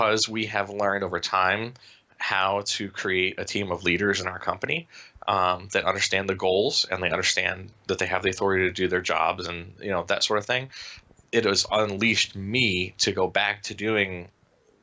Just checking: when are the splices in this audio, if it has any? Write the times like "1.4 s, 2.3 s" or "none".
none